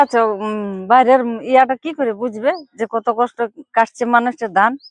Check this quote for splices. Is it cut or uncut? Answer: uncut